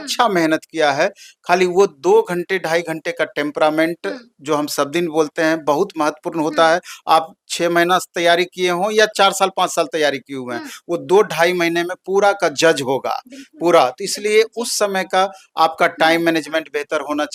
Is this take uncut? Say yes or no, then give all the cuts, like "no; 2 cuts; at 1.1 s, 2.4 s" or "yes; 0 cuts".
yes; 0 cuts